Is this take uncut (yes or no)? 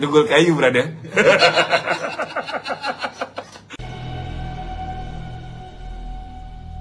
no